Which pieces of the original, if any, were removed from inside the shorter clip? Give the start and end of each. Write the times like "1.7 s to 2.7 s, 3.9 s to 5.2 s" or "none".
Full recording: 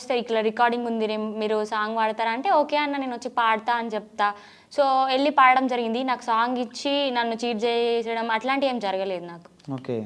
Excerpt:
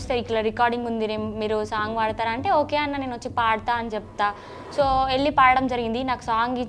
none